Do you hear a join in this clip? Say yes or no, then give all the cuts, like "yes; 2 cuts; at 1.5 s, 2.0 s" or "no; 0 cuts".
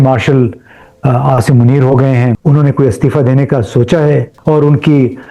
yes; 2 cuts; at 2.4 s, 4.3 s